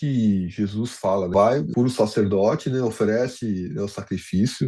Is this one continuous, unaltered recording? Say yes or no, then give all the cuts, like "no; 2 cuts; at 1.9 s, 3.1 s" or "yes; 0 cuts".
no; 1 cut; at 1.5 s